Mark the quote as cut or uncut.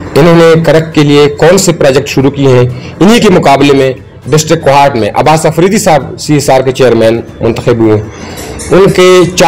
uncut